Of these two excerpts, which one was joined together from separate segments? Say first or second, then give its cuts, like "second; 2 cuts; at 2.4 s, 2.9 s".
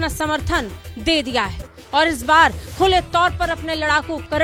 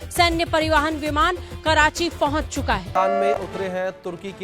second; 1 cut; at 2.9 s